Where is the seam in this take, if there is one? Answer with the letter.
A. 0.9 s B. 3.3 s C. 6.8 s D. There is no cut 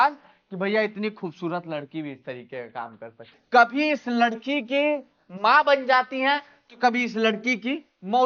B